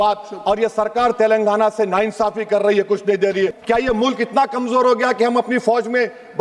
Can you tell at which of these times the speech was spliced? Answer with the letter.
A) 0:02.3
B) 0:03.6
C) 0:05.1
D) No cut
B